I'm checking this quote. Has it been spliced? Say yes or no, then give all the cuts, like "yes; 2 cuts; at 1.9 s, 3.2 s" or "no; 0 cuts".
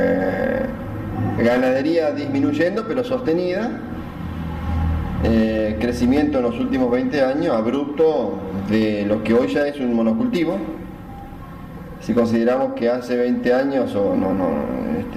yes; 1 cut; at 6.9 s